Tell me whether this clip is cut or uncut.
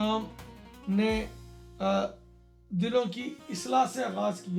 uncut